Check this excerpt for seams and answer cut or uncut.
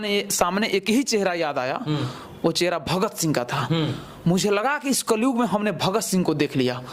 uncut